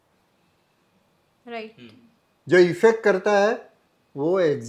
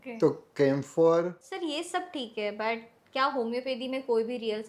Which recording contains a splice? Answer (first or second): second